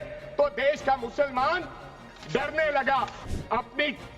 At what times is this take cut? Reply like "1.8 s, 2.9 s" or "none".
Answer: 3.2 s